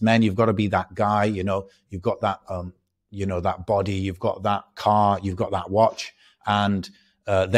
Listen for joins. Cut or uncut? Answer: uncut